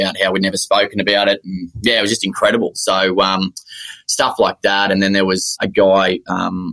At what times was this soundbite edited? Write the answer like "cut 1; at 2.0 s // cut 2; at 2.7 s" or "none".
none